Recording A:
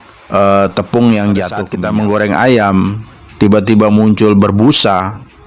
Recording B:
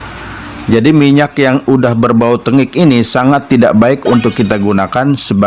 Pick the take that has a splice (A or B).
A